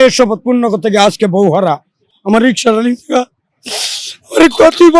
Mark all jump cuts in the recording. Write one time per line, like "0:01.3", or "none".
none